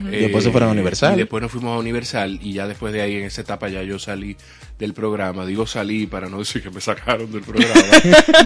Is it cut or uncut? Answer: uncut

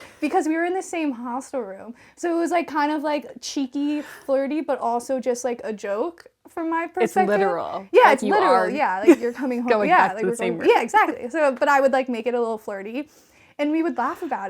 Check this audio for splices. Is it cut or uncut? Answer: uncut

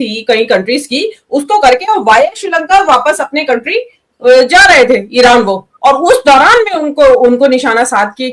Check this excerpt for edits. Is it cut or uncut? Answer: uncut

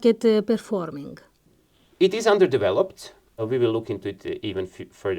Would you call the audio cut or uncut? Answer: cut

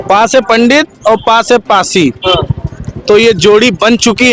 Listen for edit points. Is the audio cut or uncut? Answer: uncut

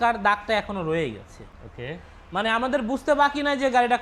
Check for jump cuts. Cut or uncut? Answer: uncut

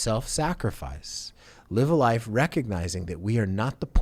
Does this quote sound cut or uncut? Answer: uncut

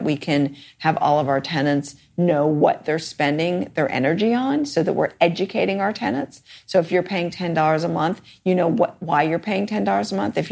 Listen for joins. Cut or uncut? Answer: uncut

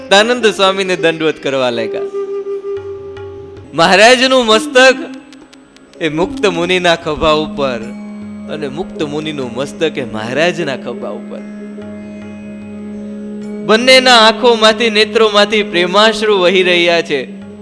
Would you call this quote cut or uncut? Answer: cut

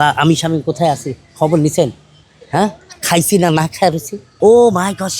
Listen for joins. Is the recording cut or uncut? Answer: cut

